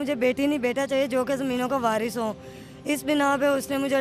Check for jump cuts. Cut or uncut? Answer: uncut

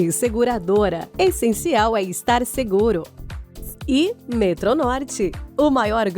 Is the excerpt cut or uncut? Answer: cut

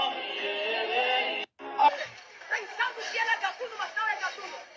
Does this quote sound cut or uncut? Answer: cut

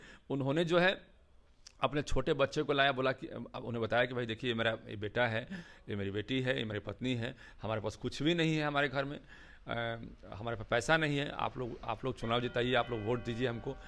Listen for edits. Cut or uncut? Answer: uncut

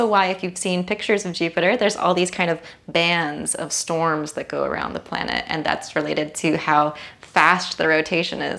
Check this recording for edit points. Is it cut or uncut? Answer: uncut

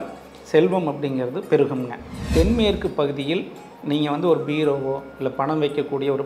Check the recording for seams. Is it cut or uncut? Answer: cut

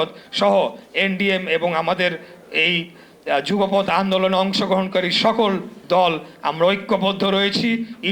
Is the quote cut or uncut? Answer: uncut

